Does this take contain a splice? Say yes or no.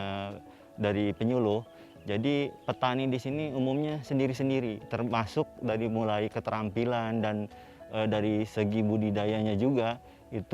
yes